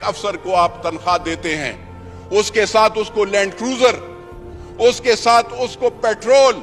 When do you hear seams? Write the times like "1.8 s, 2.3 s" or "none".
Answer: none